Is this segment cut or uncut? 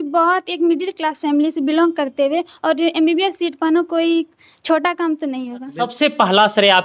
cut